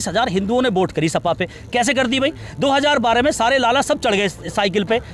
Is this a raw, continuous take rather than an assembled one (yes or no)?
yes